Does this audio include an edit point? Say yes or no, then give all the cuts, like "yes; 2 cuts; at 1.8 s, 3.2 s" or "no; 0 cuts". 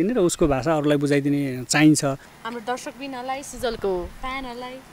yes; 1 cut; at 2.3 s